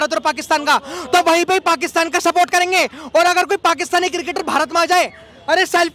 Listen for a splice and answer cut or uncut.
uncut